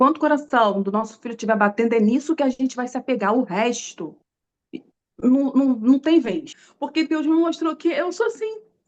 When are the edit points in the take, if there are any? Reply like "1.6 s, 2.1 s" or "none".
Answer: 6.6 s